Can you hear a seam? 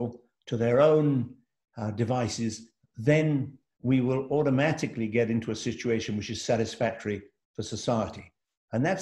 no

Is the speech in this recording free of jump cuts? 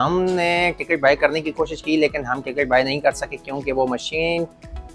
yes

